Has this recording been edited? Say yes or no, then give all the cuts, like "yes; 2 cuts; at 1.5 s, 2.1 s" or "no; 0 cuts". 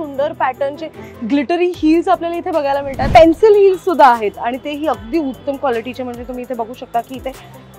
yes; 1 cut; at 3.1 s